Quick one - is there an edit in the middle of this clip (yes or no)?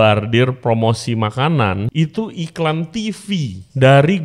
yes